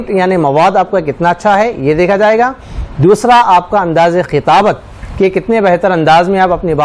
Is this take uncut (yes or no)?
yes